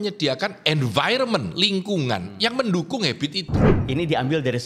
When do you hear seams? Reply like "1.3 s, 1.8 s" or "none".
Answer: 3.7 s